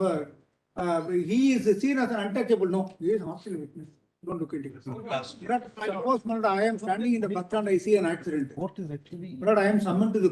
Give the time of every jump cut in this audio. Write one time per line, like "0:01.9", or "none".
0:05.1